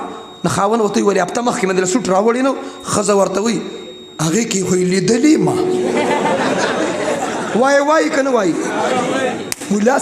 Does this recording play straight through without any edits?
yes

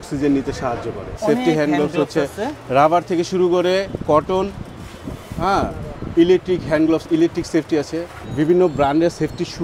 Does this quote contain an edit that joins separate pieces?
yes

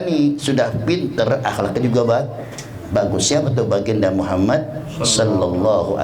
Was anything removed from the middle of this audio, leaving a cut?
no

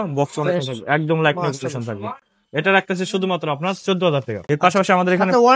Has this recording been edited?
no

